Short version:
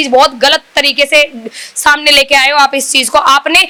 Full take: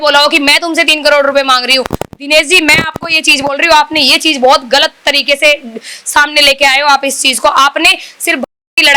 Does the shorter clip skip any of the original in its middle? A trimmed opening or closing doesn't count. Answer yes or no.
no